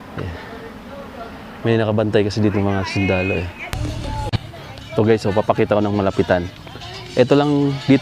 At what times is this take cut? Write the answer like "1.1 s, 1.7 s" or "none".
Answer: 3.6 s